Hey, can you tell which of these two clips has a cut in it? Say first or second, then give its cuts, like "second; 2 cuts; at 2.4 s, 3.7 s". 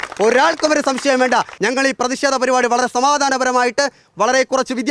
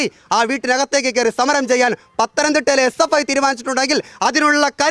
first; 1 cut; at 1.5 s